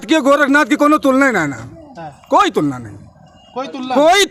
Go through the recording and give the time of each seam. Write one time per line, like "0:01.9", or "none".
none